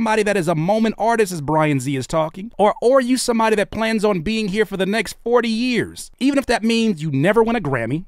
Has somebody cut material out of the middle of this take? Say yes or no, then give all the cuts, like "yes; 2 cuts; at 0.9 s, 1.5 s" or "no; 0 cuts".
no; 0 cuts